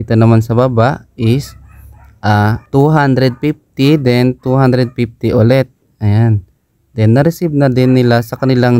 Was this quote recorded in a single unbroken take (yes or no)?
no